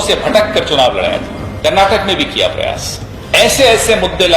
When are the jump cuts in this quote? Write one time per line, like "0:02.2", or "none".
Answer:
0:01.4
0:03.2